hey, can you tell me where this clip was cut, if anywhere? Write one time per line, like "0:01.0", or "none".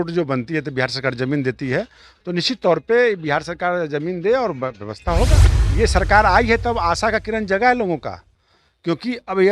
0:05.5